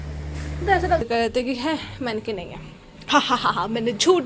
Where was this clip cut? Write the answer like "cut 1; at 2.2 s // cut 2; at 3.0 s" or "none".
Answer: cut 1; at 1.0 s

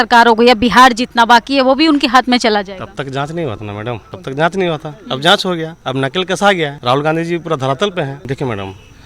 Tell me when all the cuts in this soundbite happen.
cut 1; at 4.1 s // cut 2; at 5.8 s // cut 3; at 6.8 s // cut 4; at 8.2 s

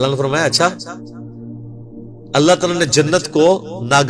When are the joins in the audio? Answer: cut 1; at 0.7 s // cut 2; at 2.3 s

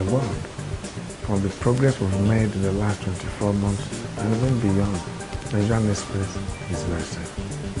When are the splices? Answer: cut 1; at 3.5 s

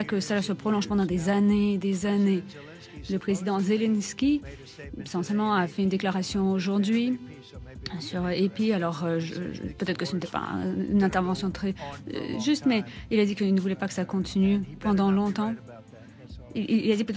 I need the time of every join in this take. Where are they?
none

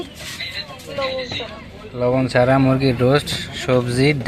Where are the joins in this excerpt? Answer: none

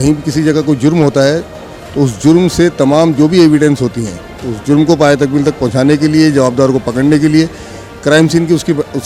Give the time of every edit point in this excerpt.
none

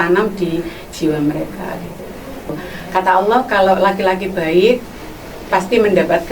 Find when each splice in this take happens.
cut 1; at 2.6 s

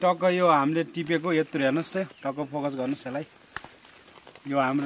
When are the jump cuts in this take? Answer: none

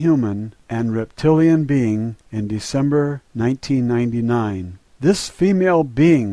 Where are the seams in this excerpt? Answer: cut 1; at 1.4 s

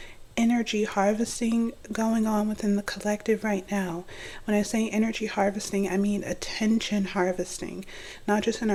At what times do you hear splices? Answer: none

